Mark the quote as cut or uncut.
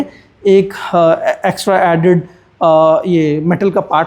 uncut